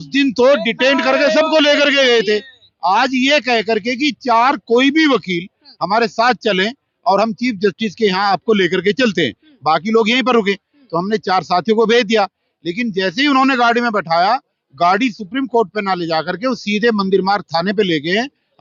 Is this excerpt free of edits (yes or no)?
yes